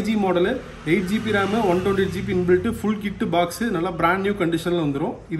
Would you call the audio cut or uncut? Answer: uncut